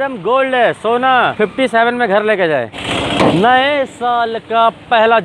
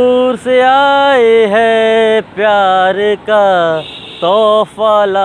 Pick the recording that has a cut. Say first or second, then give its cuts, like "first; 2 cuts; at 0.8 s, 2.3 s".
first; 2 cuts; at 1.3 s, 2.8 s